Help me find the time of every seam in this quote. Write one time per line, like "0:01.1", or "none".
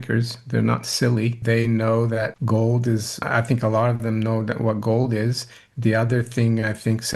0:01.4
0:02.4
0:03.1